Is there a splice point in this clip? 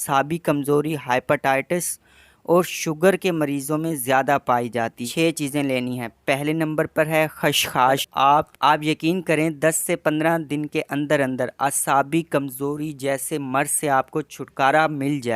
yes; 2 cuts; at 5.0 s, 8.1 s

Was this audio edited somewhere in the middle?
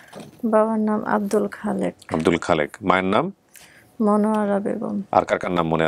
no; 0 cuts

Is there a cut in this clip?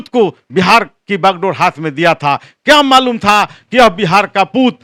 no; 0 cuts

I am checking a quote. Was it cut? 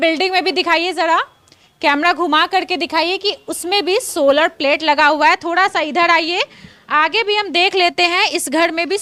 no; 0 cuts

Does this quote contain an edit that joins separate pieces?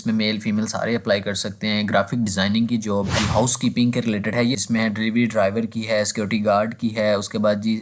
yes; 2 cuts; at 3.2 s, 4.6 s

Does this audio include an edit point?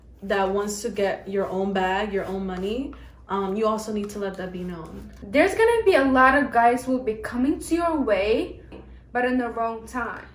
yes; 2 cuts; at 5.1 s, 8.8 s

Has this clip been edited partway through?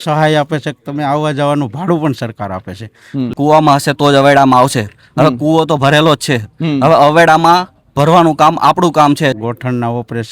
yes; 2 cuts; at 3.3 s, 9.3 s

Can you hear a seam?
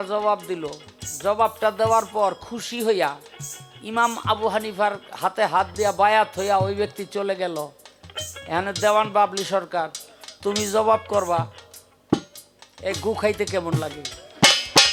no; 0 cuts

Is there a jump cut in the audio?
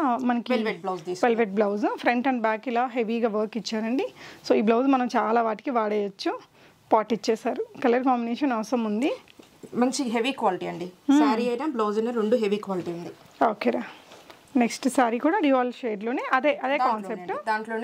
no; 0 cuts

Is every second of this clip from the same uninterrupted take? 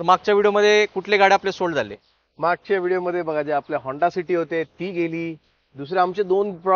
yes; 0 cuts

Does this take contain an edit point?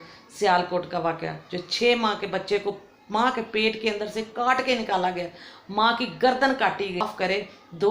yes; 1 cut; at 7.0 s

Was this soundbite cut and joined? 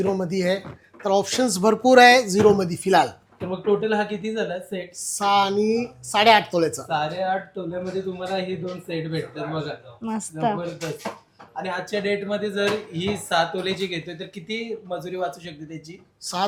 no; 0 cuts

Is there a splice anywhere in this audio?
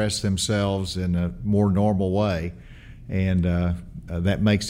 no; 0 cuts

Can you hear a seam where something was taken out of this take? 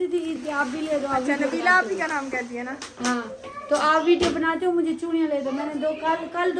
no; 0 cuts

